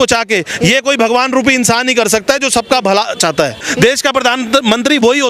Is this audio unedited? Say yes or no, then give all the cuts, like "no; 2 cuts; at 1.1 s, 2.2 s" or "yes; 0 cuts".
no; 1 cut; at 3.6 s